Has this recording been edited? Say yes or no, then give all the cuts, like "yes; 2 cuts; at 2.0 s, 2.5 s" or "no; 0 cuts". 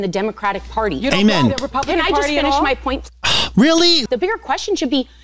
yes; 1 cut; at 4.0 s